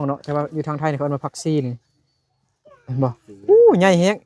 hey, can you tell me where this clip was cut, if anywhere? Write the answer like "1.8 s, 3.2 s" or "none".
none